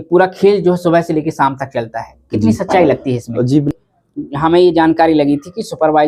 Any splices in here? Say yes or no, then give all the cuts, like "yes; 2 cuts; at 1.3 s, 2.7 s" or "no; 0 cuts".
yes; 1 cut; at 3.7 s